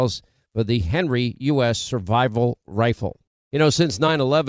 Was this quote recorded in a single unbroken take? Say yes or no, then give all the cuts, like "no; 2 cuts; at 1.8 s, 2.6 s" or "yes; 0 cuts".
no; 1 cut; at 3.2 s